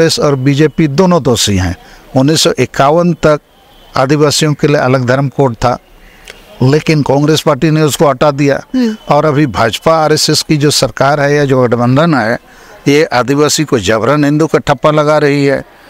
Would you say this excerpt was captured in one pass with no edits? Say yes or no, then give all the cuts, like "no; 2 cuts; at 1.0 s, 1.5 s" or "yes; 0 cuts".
yes; 0 cuts